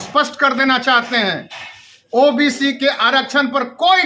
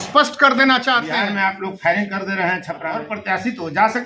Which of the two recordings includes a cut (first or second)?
second